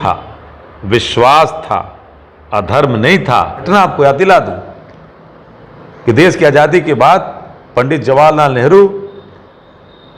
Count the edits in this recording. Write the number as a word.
one